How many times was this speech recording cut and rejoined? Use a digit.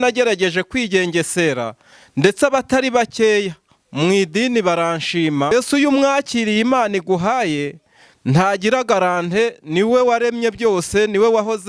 1